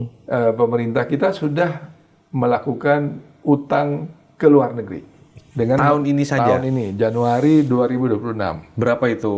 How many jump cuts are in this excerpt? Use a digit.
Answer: 0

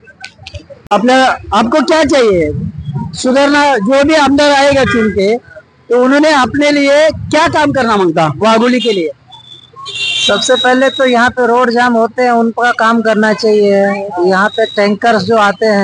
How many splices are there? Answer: 1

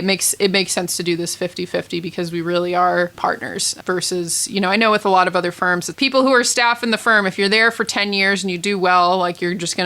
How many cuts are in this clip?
2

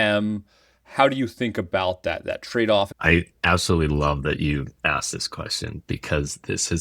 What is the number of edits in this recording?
1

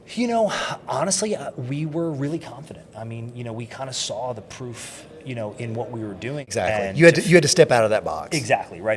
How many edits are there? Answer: 1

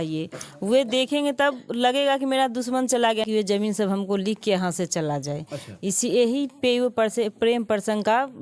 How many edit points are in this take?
1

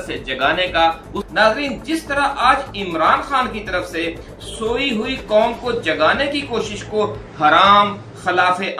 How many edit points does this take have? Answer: 1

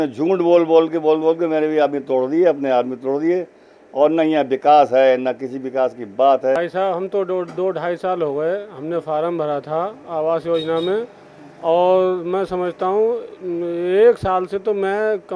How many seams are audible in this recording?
1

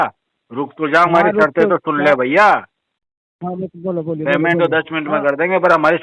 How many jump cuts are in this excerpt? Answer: 0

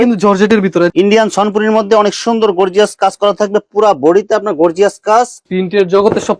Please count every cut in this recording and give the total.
2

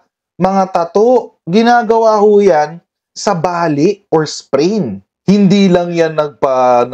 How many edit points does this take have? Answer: 1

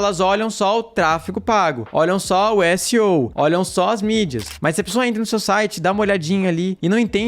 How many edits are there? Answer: 1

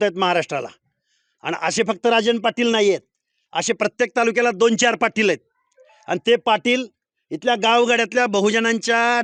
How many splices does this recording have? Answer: 0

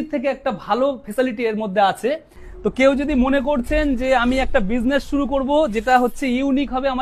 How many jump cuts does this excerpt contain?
1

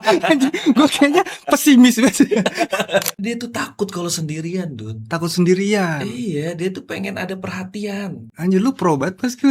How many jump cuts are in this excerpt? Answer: 1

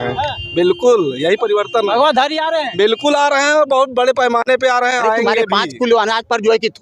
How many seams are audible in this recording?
1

